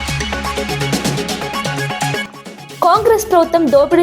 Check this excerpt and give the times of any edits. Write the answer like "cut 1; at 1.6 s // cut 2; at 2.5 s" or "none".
cut 1; at 2.2 s